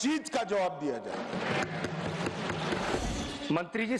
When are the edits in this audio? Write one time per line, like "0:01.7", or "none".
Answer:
0:03.0